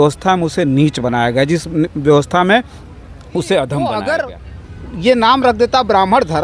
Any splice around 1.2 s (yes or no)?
no